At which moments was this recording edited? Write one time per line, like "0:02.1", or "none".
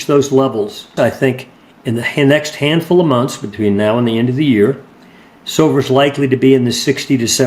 0:00.9